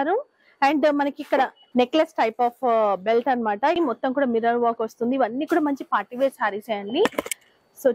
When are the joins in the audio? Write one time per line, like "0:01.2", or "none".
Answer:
0:03.8